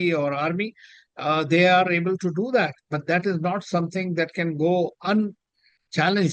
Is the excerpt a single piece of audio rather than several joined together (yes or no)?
yes